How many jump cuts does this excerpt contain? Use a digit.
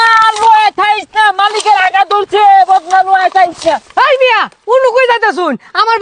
0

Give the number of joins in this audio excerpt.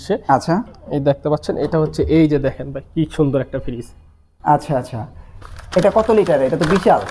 0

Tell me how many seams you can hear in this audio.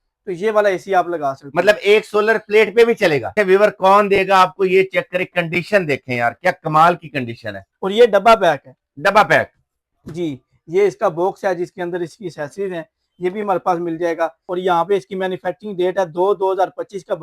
2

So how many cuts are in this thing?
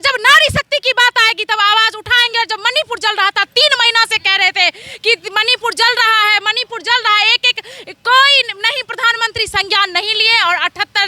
0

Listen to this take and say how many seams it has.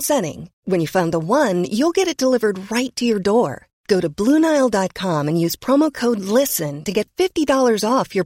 0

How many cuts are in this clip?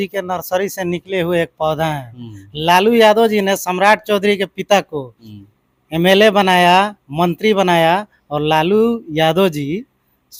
0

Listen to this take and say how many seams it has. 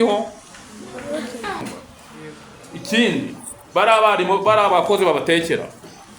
1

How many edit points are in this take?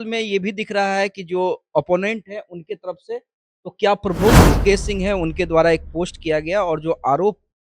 1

